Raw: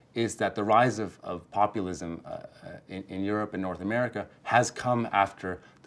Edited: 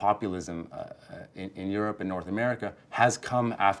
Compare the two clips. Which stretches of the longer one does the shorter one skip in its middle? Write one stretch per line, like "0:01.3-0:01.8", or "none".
none